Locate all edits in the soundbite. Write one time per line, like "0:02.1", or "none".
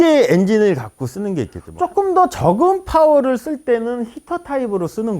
0:01.6